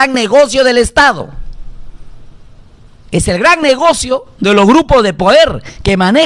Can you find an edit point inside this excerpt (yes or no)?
no